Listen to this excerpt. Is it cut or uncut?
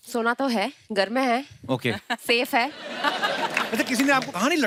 uncut